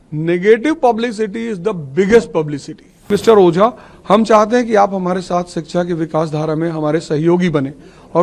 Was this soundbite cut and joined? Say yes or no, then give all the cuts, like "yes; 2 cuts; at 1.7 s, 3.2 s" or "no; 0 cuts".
yes; 1 cut; at 3.1 s